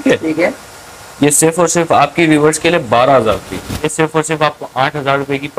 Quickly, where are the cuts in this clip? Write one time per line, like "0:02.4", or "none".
0:03.9